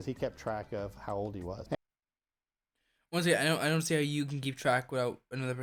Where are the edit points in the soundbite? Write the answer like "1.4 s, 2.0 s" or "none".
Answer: none